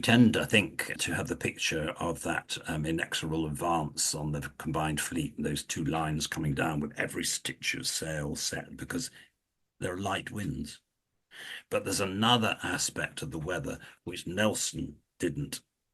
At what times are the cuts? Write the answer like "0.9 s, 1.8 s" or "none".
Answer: 1.0 s